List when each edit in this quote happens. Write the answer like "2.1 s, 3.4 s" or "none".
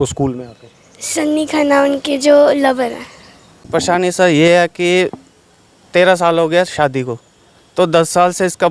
3.6 s